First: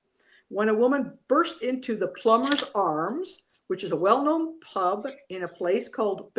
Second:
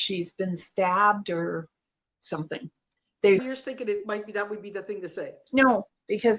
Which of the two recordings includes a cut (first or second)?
second